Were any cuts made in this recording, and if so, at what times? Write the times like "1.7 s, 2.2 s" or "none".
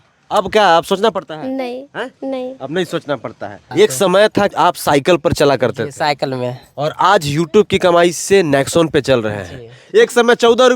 3.6 s, 9.8 s